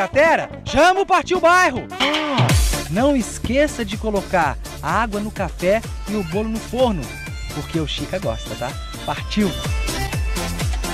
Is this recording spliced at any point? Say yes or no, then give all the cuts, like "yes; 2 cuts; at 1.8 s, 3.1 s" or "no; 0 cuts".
yes; 1 cut; at 2.0 s